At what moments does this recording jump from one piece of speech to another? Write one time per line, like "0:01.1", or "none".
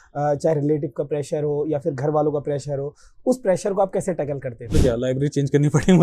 0:04.7